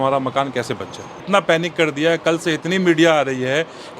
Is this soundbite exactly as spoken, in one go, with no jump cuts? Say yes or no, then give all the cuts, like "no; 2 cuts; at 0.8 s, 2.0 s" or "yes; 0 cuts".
no; 1 cut; at 1.2 s